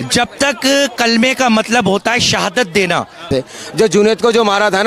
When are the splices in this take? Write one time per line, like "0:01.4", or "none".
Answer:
0:03.3